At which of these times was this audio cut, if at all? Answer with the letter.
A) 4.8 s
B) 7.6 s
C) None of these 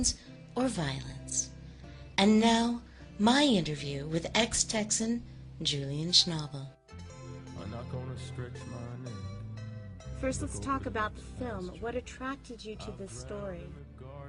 B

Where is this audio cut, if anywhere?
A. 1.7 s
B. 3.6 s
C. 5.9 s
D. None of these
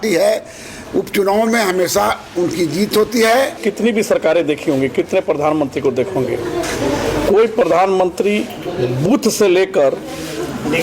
B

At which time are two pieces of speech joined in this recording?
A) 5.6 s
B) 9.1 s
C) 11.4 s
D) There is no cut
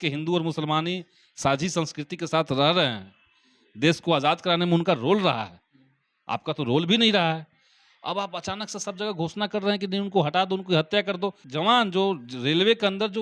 C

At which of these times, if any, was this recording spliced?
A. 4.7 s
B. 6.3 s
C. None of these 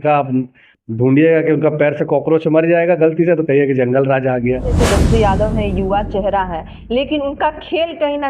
A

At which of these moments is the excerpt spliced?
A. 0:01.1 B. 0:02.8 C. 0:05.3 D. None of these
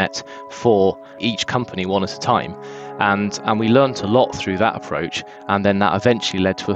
A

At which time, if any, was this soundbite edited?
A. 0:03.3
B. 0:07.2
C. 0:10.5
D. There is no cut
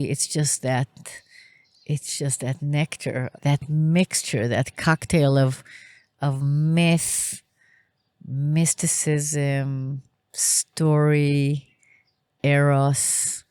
A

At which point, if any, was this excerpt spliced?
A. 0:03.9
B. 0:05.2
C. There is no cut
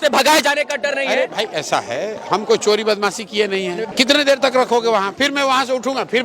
A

